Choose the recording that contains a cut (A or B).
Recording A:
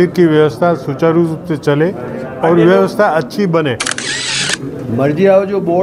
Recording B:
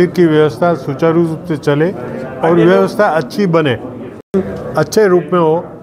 A